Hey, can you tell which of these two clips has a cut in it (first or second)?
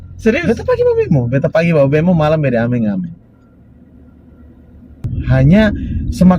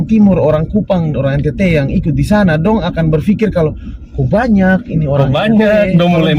first